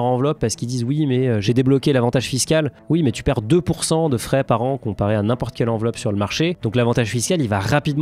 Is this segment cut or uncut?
cut